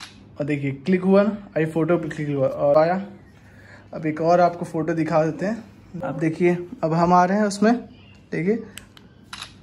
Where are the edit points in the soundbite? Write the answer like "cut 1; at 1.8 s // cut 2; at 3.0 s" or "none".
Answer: cut 1; at 2.8 s // cut 2; at 6.0 s

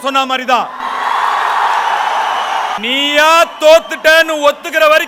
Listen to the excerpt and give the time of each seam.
none

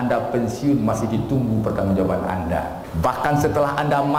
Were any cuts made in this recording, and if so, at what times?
cut 1; at 2.8 s

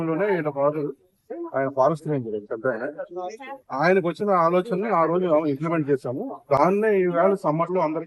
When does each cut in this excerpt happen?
none

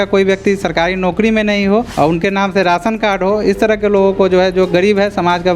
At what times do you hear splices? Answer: cut 1; at 1.9 s

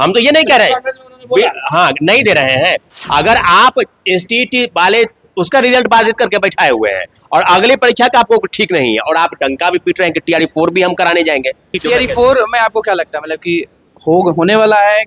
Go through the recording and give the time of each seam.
cut 1; at 2.9 s // cut 2; at 11.8 s

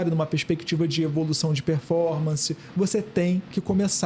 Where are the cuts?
none

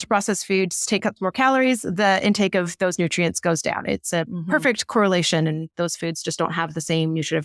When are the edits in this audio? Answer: cut 1; at 5.7 s

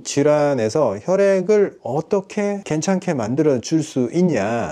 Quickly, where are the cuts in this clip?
none

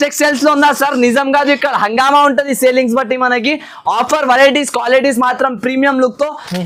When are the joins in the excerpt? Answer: none

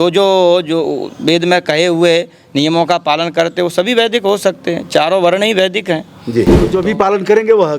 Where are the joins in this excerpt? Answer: cut 1; at 6.7 s

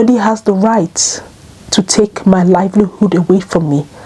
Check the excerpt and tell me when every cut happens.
none

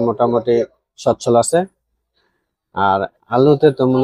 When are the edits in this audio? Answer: none

